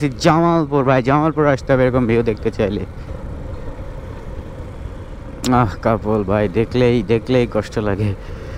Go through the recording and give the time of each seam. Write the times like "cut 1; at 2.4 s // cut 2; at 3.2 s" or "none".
cut 1; at 3.1 s